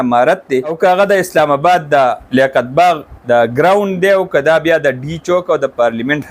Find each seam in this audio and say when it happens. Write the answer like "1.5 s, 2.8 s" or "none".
0.7 s, 2.2 s, 3.1 s